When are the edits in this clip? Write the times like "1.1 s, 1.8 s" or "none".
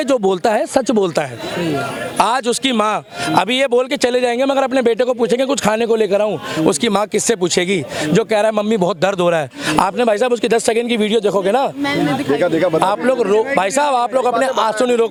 none

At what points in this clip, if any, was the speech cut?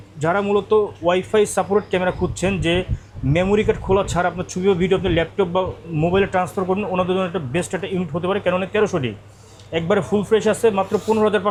none

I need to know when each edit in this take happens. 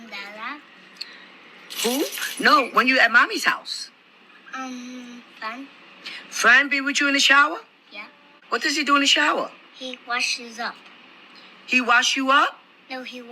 8.4 s

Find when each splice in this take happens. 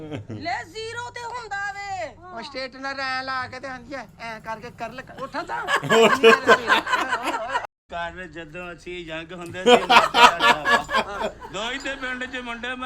7.7 s

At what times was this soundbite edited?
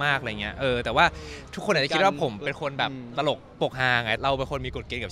4.2 s

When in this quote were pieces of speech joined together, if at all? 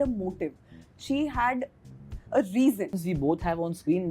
3.0 s

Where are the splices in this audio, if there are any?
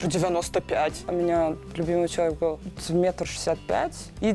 1.0 s

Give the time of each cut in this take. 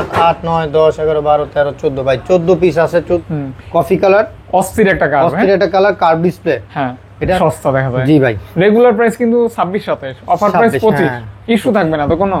3.2 s, 7.4 s

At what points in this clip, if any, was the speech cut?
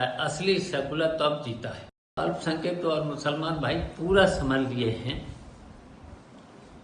2.2 s

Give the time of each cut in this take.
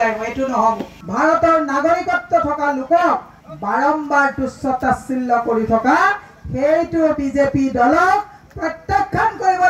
1.0 s

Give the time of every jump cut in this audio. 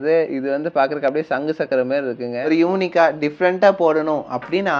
2.3 s

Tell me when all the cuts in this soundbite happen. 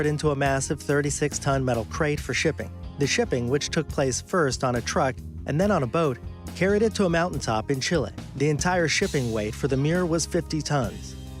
5.9 s

